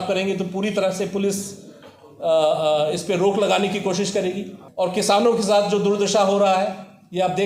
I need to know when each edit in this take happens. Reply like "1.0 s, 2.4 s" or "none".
4.6 s